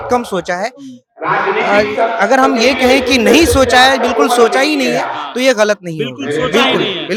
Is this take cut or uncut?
uncut